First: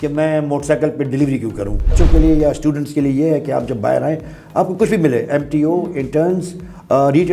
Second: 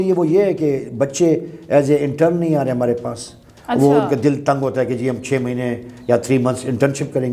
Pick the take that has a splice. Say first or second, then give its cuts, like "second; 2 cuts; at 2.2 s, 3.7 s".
first; 1 cut; at 2.0 s